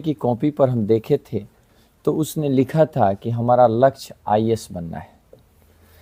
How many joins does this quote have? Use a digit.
0